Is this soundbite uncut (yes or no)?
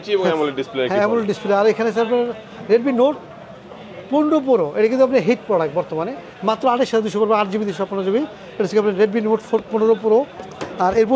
yes